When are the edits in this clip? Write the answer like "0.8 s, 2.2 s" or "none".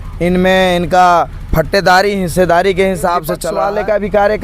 3.5 s